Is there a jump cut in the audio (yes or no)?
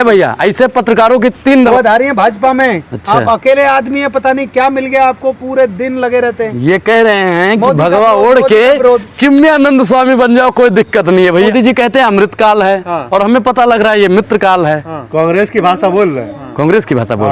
yes